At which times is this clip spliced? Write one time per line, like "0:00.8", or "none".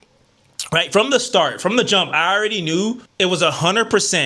0:03.1